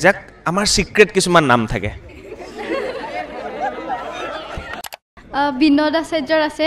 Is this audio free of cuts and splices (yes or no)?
no